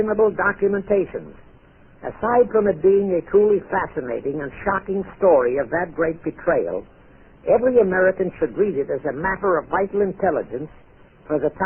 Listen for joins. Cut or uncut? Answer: uncut